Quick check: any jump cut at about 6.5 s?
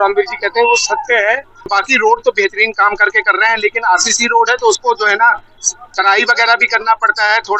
no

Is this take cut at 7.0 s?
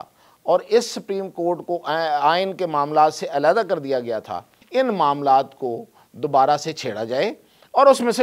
no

